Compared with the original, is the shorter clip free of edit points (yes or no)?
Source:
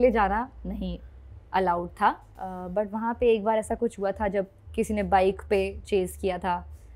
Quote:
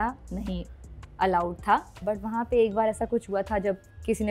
no